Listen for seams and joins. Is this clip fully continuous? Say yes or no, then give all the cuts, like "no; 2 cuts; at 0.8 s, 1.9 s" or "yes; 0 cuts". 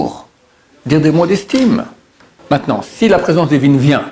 no; 1 cut; at 2.3 s